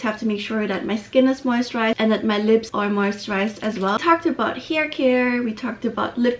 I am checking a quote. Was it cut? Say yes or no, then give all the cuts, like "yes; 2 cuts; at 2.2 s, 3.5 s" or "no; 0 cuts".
yes; 2 cuts; at 2.7 s, 4.0 s